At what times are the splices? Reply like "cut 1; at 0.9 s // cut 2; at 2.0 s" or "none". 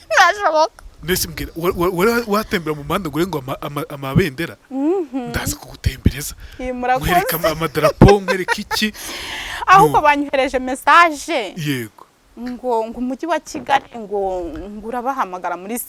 none

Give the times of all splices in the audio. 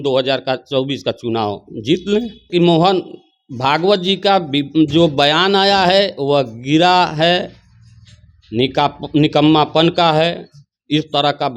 cut 1; at 2.5 s

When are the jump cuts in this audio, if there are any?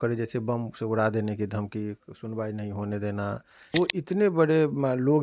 cut 1; at 3.7 s

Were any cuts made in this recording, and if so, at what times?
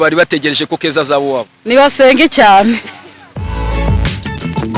none

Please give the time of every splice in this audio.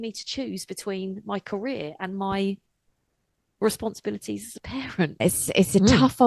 cut 1; at 5.2 s

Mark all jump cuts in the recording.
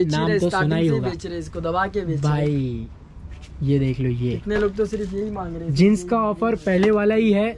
none

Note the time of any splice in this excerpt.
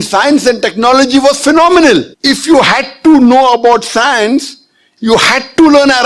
cut 1; at 2.1 s // cut 2; at 4.9 s

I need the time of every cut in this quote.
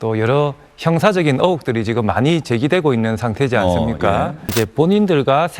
cut 1; at 4.4 s

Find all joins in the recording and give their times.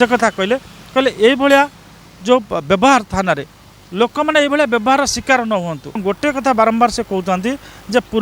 cut 1; at 6.0 s

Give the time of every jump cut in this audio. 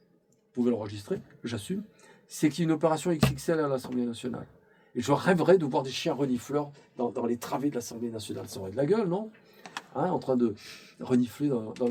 none

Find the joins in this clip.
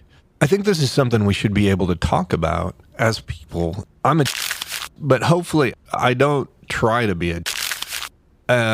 cut 1; at 3.8 s

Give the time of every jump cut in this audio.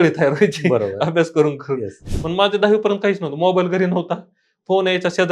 cut 1; at 2.0 s

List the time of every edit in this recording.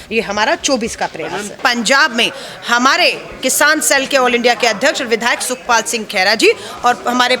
cut 1; at 1.6 s

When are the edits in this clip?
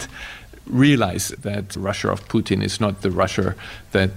cut 1; at 1.3 s

